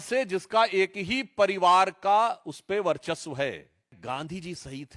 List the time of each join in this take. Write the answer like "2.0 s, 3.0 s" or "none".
4.0 s